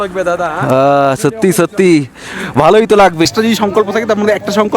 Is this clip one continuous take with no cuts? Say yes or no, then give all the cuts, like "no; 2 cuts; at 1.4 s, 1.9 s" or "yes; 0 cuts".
no; 1 cut; at 3.3 s